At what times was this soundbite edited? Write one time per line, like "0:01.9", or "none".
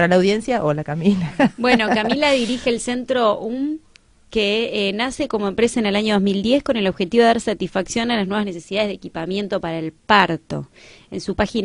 0:02.8